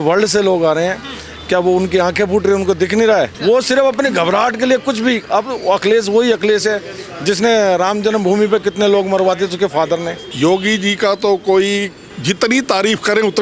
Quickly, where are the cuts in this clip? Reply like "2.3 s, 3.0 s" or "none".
3.3 s, 10.2 s, 12.0 s